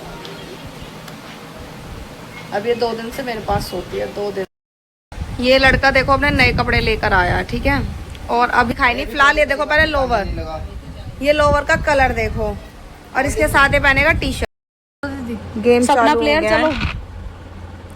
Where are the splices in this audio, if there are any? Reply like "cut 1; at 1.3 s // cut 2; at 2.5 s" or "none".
cut 1; at 4.5 s // cut 2; at 8.7 s // cut 3; at 14.4 s